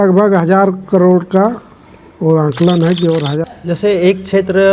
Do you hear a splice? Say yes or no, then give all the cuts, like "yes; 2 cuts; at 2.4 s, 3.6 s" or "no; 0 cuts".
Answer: yes; 1 cut; at 3.4 s